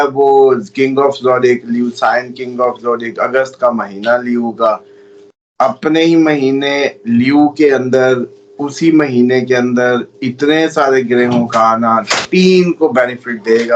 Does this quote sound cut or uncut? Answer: uncut